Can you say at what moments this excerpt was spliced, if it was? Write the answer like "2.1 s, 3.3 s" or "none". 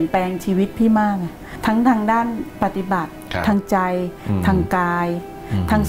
1.5 s

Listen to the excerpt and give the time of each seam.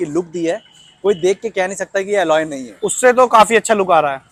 none

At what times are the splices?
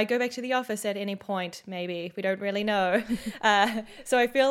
none

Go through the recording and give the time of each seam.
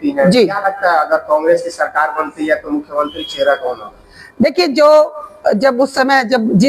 none

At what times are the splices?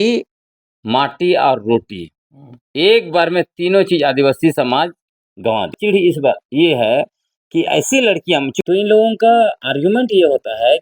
5.8 s, 8.6 s

